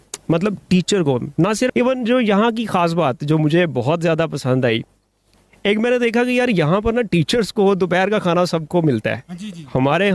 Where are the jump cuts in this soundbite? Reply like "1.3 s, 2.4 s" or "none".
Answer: 1.7 s